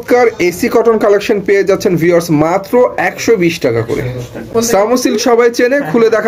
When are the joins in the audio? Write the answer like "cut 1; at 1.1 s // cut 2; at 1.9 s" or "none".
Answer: cut 1; at 4.5 s